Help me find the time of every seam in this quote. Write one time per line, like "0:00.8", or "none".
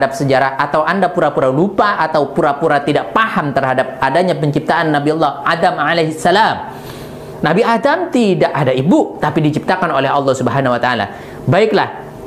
none